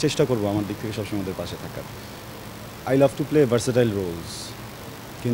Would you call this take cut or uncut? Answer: uncut